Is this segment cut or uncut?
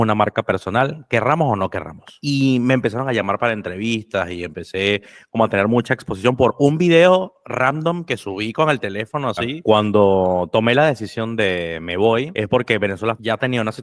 cut